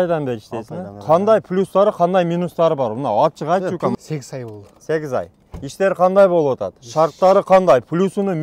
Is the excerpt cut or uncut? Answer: cut